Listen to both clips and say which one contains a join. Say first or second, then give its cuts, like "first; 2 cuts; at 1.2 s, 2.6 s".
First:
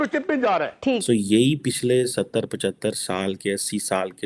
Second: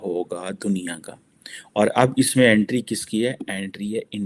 first; 1 cut; at 1.0 s